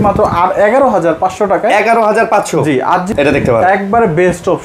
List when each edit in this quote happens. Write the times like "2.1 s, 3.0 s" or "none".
3.1 s